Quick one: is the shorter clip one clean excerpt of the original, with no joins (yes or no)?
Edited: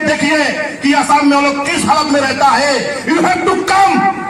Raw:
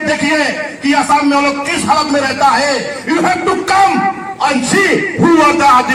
yes